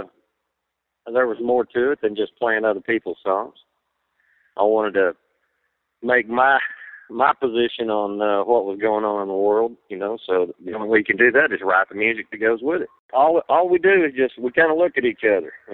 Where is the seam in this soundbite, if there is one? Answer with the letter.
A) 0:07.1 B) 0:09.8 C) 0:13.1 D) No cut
C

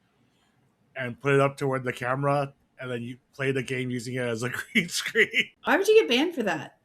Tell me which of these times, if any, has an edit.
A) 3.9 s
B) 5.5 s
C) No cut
B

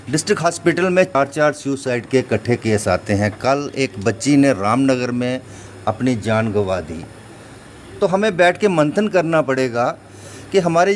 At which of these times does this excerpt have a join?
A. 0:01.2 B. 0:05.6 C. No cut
A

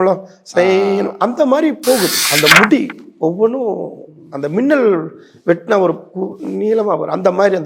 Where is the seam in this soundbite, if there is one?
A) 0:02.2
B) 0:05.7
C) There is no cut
A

